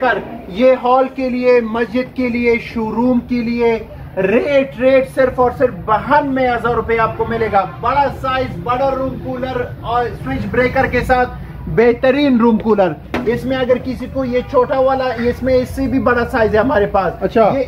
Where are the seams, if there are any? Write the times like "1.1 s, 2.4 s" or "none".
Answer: none